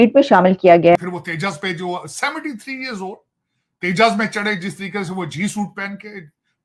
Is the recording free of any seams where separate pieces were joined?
no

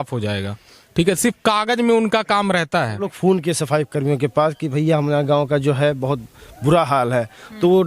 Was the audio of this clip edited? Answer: yes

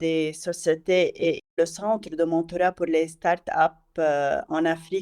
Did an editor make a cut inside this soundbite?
yes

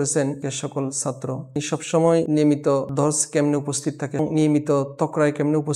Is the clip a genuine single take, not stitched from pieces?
yes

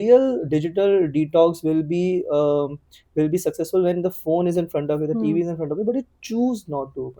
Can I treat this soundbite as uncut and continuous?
yes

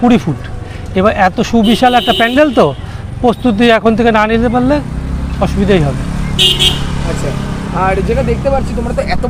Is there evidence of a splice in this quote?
no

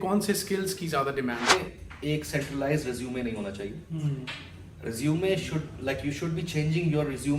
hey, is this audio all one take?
no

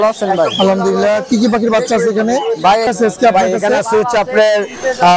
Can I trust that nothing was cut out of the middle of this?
no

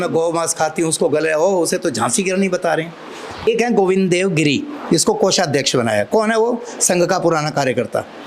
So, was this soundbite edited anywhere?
yes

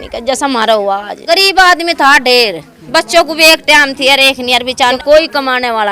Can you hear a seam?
yes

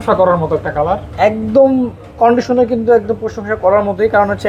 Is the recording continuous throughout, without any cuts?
yes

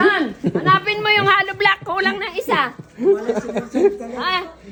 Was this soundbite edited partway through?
no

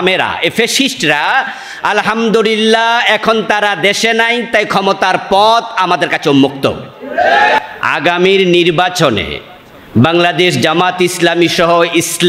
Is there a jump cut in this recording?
yes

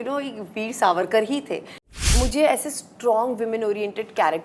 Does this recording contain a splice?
yes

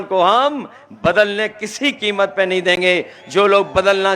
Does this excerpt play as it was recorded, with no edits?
yes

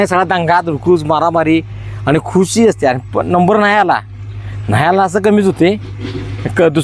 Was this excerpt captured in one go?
yes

